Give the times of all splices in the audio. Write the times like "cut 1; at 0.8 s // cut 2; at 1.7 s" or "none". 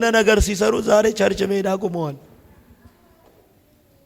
none